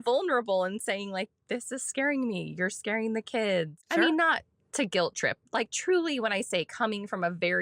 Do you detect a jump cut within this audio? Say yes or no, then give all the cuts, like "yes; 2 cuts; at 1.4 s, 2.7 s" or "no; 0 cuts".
yes; 1 cut; at 3.8 s